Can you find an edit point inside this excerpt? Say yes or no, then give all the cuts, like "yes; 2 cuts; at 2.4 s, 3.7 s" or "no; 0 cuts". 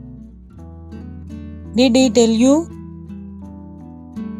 no; 0 cuts